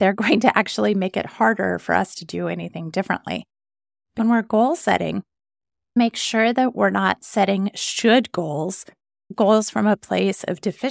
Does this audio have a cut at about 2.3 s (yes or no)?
no